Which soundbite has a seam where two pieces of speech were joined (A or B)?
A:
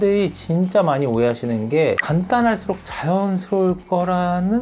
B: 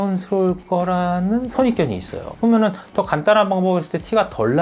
B